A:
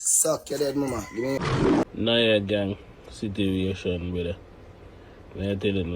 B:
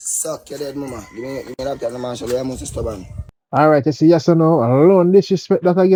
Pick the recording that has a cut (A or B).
A